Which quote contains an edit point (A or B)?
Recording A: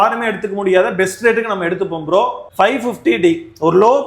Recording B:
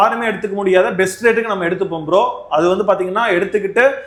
A